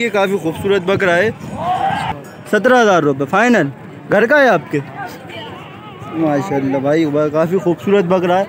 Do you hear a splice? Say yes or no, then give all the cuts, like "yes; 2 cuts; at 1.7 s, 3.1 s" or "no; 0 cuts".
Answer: yes; 1 cut; at 2.1 s